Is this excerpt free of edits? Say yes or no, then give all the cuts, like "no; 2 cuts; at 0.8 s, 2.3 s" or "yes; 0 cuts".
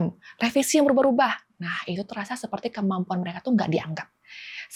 yes; 0 cuts